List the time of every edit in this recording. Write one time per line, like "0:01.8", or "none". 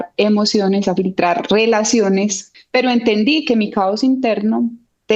0:02.4